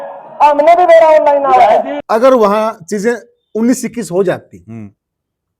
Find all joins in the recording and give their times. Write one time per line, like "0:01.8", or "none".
0:02.0